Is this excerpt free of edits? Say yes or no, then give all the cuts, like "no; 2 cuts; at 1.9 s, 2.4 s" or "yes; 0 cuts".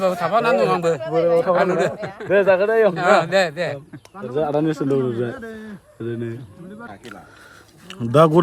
yes; 0 cuts